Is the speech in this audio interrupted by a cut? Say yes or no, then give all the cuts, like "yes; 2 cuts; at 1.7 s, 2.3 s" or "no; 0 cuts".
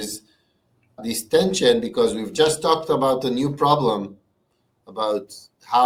no; 0 cuts